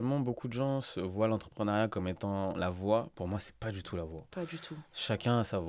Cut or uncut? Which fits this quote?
uncut